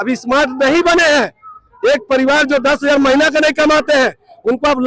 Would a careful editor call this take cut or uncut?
uncut